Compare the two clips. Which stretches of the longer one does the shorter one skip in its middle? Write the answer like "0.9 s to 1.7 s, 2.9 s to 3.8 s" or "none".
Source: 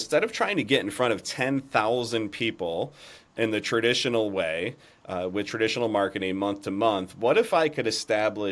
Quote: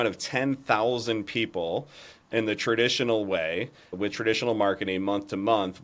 5.0 s to 5.3 s